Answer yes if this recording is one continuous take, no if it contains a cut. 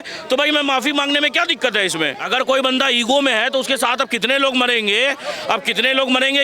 no